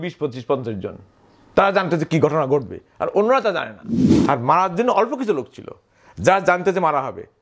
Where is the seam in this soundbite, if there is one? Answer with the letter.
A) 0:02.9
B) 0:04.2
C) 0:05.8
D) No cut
B